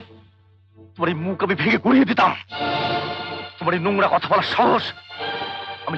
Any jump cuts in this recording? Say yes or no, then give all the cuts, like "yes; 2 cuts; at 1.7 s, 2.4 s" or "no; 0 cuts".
no; 0 cuts